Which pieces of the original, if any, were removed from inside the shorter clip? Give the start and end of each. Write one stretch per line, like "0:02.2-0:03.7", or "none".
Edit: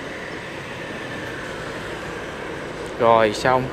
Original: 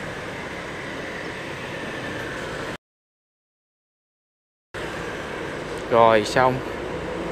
0:02.8-0:04.7